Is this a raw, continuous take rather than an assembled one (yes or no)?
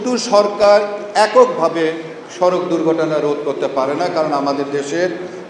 yes